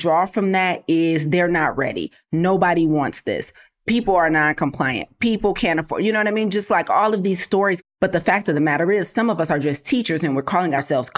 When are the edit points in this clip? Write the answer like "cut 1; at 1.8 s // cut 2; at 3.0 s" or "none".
cut 1; at 7.8 s

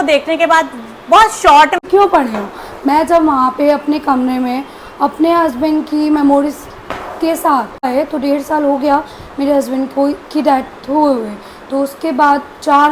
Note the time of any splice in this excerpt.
cut 1; at 1.8 s // cut 2; at 7.9 s

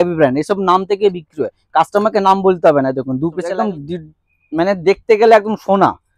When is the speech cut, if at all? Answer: cut 1; at 3.5 s

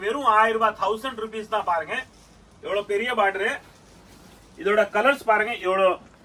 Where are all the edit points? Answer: none

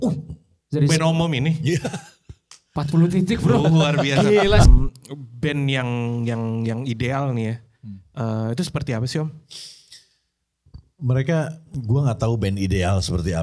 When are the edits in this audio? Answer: cut 1; at 4.7 s

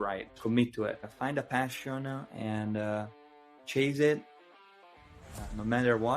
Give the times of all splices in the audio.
cut 1; at 0.9 s

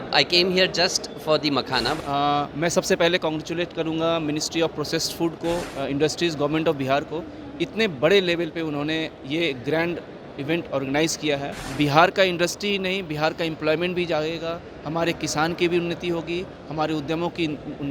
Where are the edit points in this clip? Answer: cut 1; at 2.0 s // cut 2; at 5.7 s // cut 3; at 11.6 s

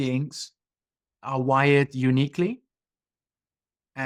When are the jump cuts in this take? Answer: none

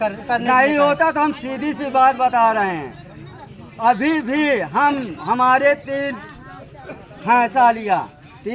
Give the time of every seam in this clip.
none

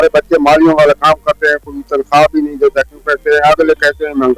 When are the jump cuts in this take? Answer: none

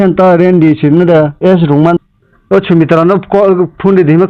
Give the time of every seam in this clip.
cut 1; at 2.0 s

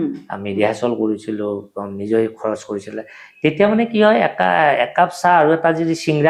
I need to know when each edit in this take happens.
none

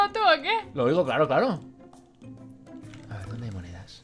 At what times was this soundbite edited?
none

